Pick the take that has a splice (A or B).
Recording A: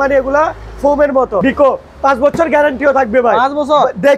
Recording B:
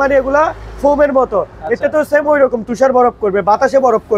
A